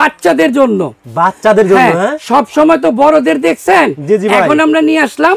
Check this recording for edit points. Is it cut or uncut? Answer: uncut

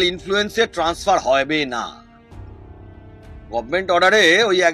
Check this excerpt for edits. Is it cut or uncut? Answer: uncut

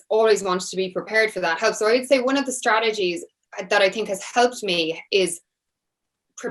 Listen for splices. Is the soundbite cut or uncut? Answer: uncut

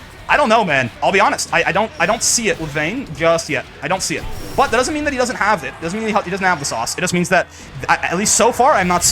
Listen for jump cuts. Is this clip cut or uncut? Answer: cut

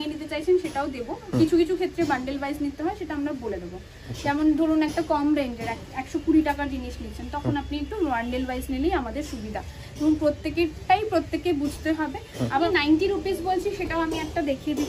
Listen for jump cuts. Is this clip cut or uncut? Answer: cut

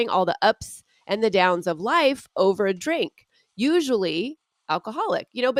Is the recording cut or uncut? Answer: uncut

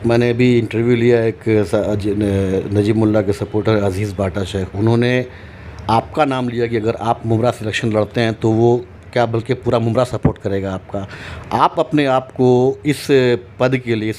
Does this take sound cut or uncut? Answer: uncut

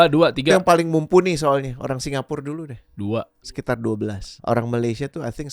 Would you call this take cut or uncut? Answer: cut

